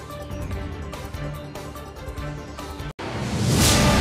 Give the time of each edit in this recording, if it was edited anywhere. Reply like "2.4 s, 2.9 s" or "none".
2.9 s